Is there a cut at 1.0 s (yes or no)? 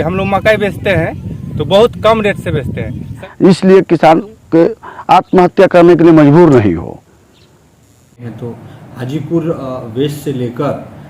no